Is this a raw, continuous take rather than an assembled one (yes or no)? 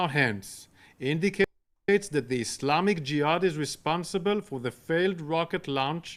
yes